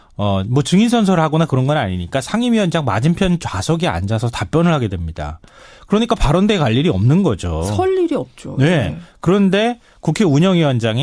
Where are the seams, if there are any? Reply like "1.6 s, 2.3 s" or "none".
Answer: none